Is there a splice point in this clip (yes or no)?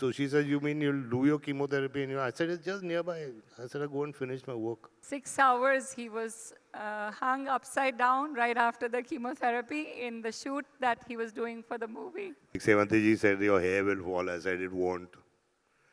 yes